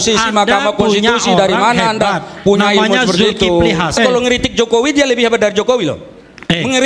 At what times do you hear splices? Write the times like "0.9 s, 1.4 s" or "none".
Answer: 4.0 s